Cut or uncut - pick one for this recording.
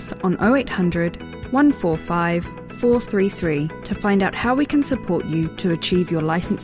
uncut